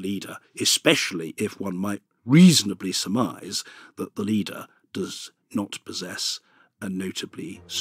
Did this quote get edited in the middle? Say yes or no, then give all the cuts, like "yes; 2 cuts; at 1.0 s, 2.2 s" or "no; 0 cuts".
no; 0 cuts